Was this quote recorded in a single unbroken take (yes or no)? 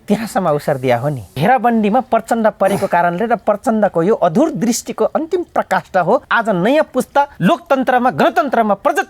no